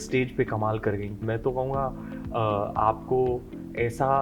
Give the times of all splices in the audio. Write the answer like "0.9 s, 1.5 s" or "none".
1.2 s